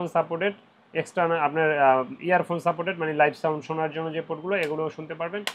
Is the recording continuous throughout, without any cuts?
yes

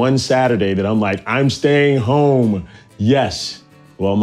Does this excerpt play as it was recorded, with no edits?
yes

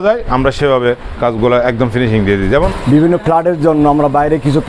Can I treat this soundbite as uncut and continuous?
no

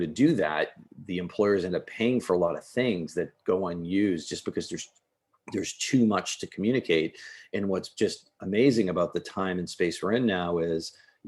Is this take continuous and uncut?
yes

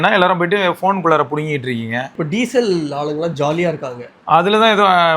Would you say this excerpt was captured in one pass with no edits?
no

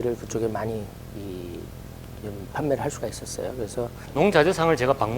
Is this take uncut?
no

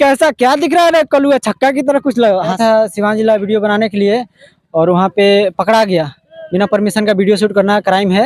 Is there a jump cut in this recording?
yes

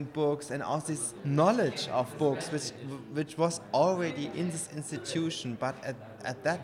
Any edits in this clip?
yes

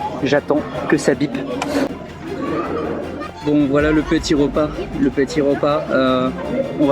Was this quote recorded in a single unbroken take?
no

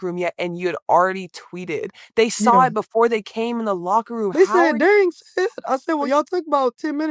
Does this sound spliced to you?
yes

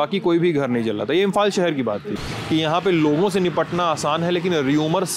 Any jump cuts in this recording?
yes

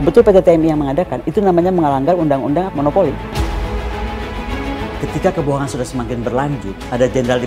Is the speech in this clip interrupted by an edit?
yes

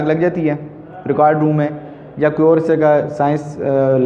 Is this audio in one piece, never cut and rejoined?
yes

